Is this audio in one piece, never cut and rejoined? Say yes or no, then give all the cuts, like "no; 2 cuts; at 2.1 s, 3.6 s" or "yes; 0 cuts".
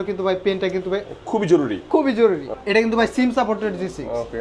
no; 1 cut; at 2.5 s